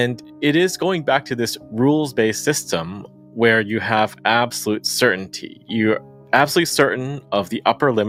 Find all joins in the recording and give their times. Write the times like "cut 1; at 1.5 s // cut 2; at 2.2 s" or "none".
none